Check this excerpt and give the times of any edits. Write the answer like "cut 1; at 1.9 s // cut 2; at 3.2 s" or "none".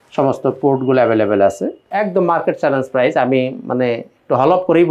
cut 1; at 1.8 s